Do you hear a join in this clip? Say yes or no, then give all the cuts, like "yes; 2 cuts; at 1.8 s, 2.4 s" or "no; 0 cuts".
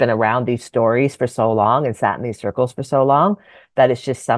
no; 0 cuts